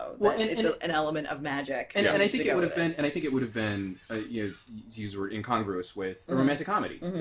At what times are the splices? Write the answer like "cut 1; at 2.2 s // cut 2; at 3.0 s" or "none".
cut 1; at 2.5 s